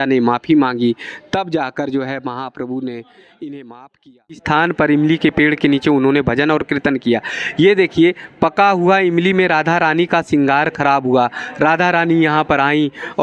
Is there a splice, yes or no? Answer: yes